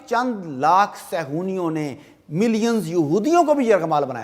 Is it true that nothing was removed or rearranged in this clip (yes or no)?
yes